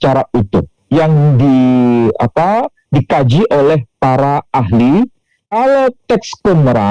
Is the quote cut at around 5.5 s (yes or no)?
yes